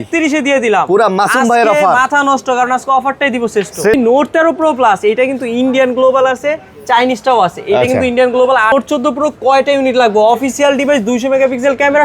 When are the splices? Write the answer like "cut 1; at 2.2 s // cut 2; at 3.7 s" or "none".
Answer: cut 1; at 3.9 s // cut 2; at 8.7 s